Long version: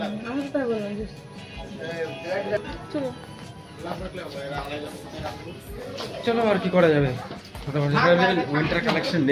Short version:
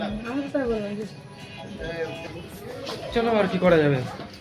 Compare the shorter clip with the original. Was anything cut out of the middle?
yes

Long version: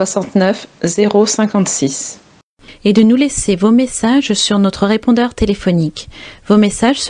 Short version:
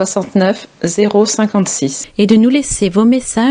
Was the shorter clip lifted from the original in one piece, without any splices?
no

